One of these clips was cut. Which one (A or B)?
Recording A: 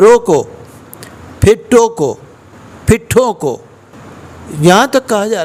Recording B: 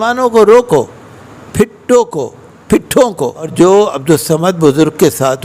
B